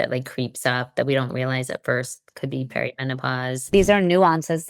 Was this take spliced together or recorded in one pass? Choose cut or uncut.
cut